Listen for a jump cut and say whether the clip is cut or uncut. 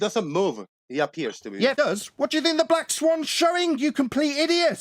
cut